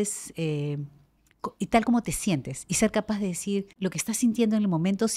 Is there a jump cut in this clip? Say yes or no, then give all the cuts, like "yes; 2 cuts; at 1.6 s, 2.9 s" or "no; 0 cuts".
yes; 1 cut; at 3.7 s